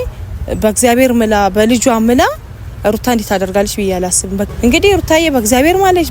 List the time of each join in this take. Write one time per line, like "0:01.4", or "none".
0:04.5